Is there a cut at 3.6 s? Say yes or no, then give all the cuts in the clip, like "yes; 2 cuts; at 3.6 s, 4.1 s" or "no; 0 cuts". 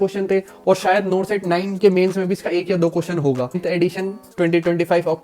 yes; 1 cut; at 3.6 s